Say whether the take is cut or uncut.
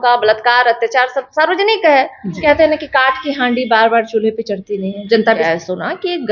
cut